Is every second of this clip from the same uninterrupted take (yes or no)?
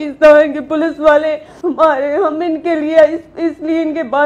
no